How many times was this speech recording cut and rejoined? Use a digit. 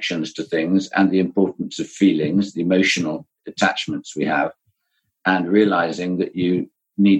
1